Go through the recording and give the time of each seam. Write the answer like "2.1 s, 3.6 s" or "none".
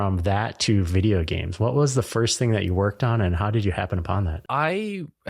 4.4 s

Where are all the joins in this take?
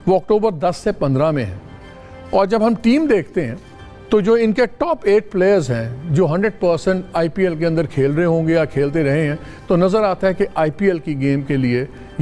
none

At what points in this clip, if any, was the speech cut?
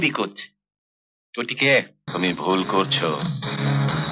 2.0 s

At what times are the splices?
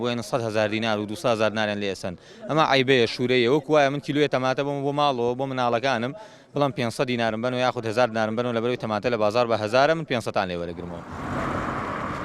none

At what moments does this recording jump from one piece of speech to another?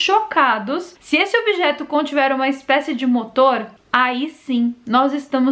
0.9 s

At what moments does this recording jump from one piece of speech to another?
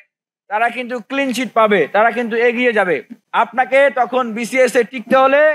3.2 s

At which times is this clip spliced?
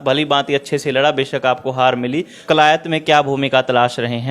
2.4 s

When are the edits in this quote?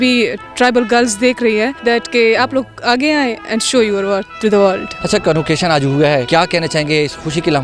1.8 s, 4.9 s, 6.3 s

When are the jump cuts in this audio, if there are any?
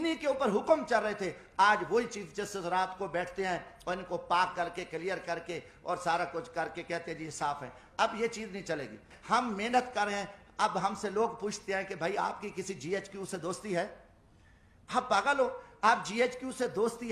9.1 s

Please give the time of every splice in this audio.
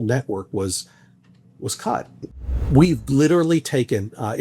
2.6 s

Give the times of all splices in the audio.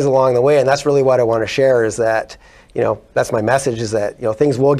none

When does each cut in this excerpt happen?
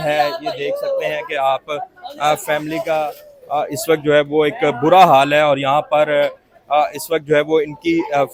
none

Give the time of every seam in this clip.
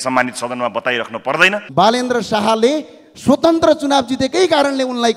1.6 s

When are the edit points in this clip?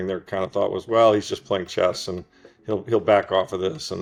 none

